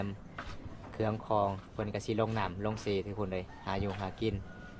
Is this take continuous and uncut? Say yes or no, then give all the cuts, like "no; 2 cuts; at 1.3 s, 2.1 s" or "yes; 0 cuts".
yes; 0 cuts